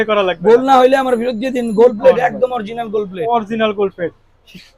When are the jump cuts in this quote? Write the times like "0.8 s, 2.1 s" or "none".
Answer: none